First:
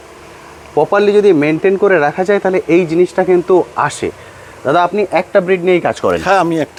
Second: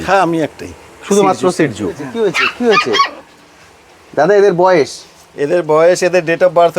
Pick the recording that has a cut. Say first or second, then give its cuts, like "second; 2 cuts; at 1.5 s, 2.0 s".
second; 1 cut; at 2.1 s